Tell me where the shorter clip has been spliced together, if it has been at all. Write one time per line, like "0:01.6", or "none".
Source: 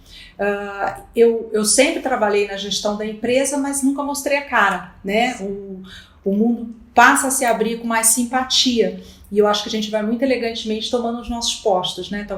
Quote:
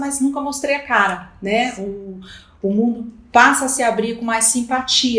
none

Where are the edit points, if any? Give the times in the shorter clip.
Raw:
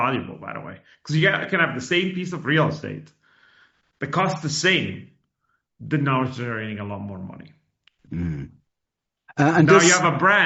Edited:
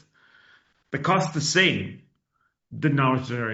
none

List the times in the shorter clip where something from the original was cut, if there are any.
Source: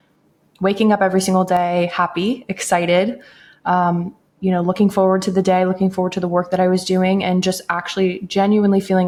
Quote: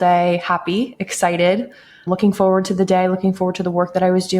0:02.1

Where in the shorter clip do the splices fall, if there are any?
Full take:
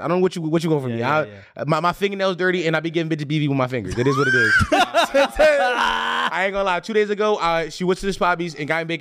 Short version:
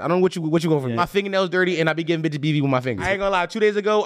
0:01.0
0:03.0

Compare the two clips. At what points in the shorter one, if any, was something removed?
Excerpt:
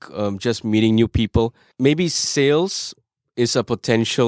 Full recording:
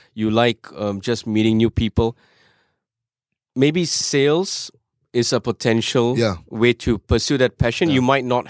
0:01.6

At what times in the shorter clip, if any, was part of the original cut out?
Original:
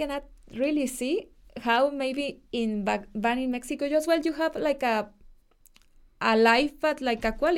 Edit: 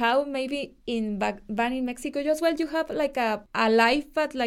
0:03.5

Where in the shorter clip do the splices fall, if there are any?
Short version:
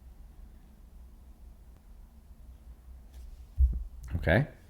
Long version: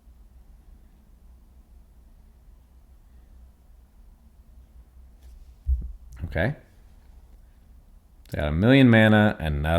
0:01.7

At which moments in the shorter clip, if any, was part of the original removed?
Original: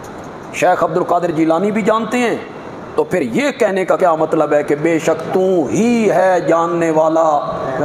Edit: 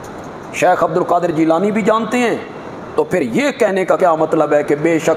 none

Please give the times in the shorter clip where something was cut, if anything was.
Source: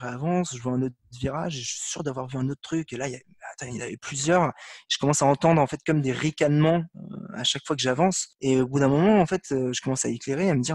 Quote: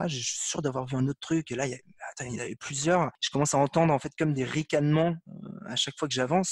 0:03.2

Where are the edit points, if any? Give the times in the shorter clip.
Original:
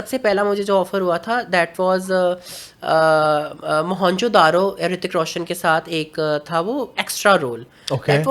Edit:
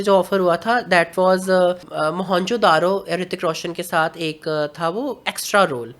0:01.9

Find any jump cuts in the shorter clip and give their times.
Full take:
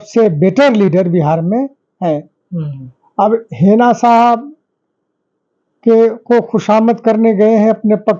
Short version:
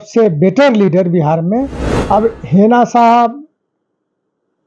0:01.8

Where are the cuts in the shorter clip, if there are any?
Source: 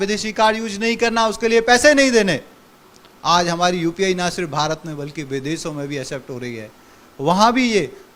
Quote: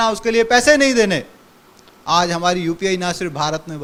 none

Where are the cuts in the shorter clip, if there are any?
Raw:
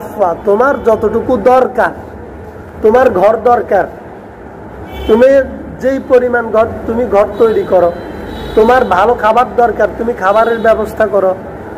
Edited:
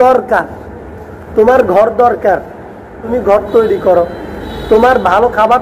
0:03.0

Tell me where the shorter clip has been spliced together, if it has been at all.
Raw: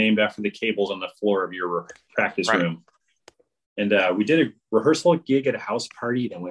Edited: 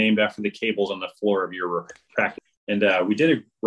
0:02.3

